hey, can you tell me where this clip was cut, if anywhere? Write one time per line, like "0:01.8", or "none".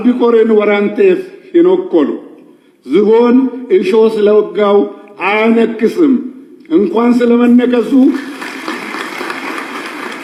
none